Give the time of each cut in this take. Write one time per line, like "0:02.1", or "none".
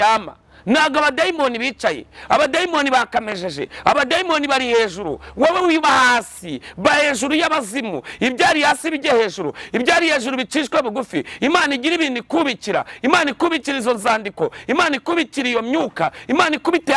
none